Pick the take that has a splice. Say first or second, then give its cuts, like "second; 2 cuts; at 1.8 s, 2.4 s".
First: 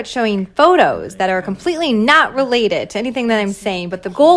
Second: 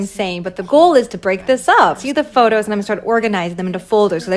second; 1 cut; at 2.0 s